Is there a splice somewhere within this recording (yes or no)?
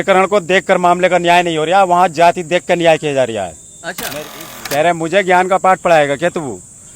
yes